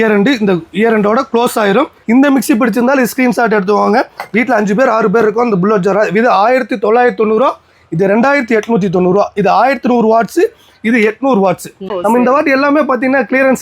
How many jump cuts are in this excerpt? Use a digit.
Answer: 2